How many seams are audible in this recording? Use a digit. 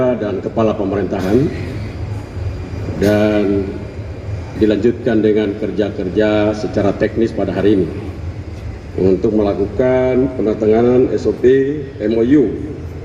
0